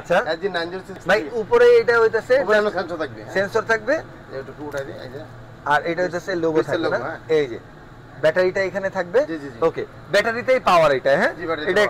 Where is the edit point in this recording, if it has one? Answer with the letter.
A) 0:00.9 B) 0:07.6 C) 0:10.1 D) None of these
A